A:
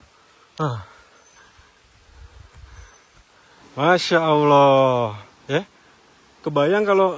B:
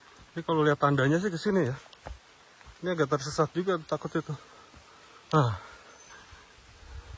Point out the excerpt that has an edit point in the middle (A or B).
A